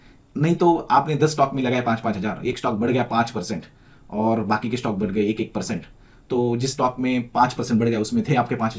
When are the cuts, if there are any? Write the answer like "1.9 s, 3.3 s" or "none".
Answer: none